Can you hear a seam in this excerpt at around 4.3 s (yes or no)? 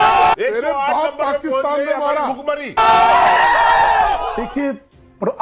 yes